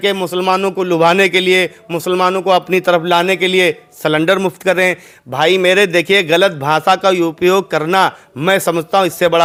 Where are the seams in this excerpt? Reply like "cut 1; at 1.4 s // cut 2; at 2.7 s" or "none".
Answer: none